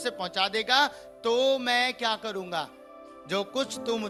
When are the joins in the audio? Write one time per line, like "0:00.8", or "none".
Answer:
none